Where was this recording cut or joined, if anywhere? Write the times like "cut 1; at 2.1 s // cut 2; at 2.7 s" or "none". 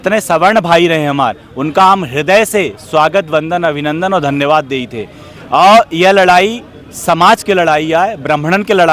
none